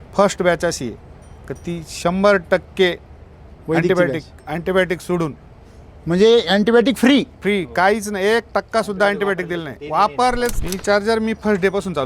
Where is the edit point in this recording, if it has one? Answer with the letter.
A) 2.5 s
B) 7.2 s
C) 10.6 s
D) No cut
C